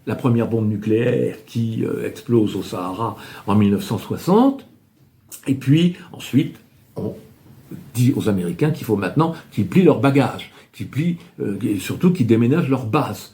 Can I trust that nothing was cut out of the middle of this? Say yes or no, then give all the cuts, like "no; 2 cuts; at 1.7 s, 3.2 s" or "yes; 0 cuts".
yes; 0 cuts